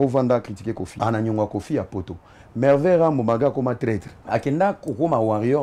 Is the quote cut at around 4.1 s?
yes; 2 cuts; at 0.9 s, 4.1 s

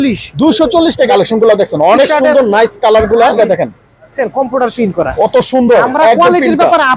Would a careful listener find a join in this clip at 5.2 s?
no; 2 cuts; at 1.1 s, 3.3 s

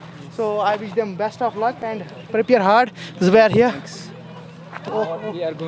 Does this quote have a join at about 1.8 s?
no; 0 cuts

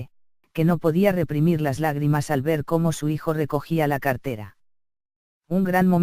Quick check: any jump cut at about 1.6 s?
yes; 1 cut; at 1.6 s

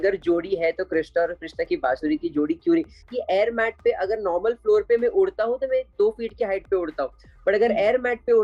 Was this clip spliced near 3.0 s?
yes; 1 cut; at 3.0 s

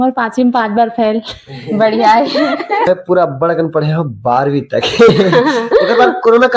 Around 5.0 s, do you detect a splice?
no; 1 cut; at 2.9 s

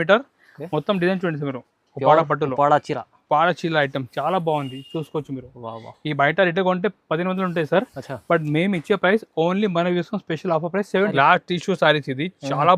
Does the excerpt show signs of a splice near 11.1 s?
yes; 1 cut; at 11.1 s

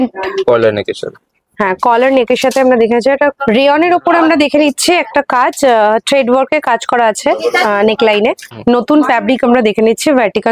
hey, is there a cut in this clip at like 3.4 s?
yes; 2 cuts; at 3.4 s, 8.5 s

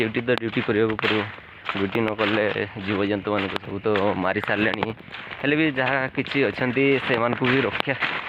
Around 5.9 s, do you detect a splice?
no; 0 cuts

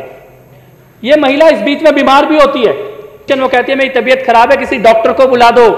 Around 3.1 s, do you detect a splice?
yes; 1 cut; at 3.1 s

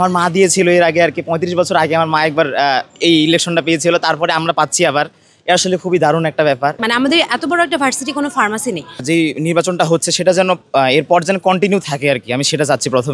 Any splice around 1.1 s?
no; 2 cuts; at 6.8 s, 8.9 s

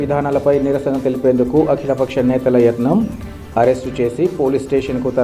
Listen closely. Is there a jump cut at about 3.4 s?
no; 0 cuts

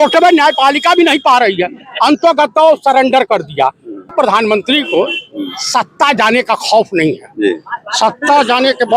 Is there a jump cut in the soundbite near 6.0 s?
no; 1 cut; at 4.1 s

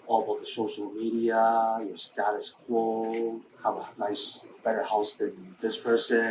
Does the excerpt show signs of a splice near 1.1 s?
no; 2 cuts; at 3.5 s, 5.5 s

